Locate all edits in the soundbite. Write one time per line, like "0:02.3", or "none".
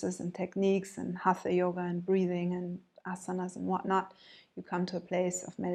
none